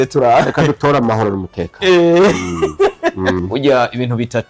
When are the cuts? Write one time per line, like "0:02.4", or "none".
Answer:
0:03.4